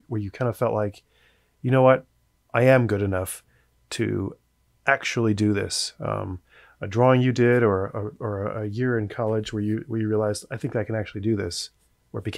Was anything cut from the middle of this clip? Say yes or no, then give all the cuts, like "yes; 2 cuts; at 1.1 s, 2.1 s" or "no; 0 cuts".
no; 0 cuts